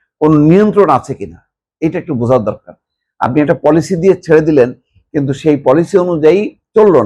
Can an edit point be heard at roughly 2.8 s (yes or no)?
no